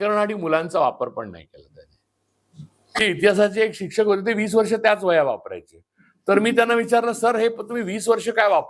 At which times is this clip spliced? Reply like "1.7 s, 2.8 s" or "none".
3.0 s